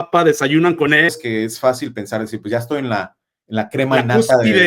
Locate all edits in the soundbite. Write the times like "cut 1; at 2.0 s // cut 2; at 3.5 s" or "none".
cut 1; at 1.1 s

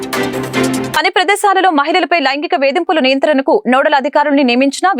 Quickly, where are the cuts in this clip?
cut 1; at 0.9 s

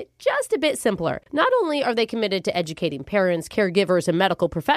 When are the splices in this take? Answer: none

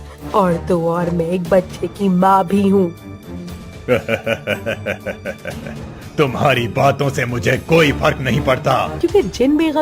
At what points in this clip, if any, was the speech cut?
cut 1; at 8.9 s

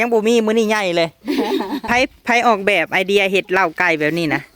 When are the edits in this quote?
cut 1; at 1.8 s

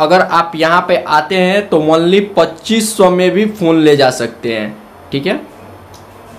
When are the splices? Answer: none

